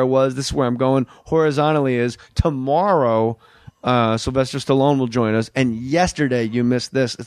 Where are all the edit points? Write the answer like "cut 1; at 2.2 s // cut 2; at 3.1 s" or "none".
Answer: cut 1; at 1.6 s